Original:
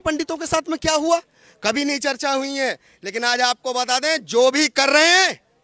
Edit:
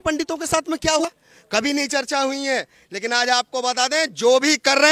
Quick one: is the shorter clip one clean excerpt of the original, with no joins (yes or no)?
no